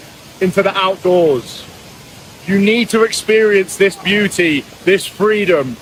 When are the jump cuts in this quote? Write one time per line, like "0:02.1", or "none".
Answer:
none